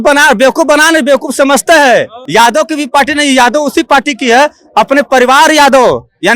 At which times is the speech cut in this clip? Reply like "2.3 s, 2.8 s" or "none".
2.2 s

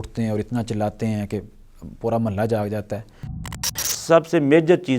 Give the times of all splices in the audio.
3.7 s

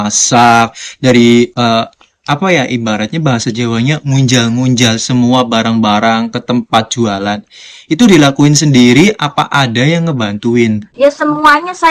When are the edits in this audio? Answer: 10.9 s

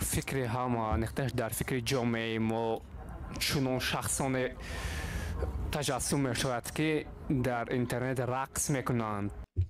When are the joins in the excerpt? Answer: none

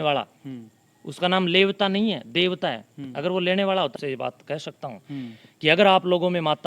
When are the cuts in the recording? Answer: 3.9 s

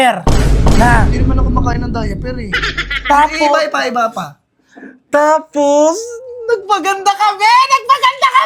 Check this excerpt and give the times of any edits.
none

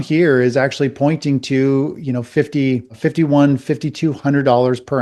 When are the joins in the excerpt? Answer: none

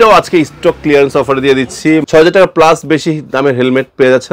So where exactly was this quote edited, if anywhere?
none

